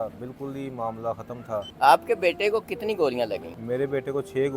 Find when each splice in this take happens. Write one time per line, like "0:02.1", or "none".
0:01.7
0:03.5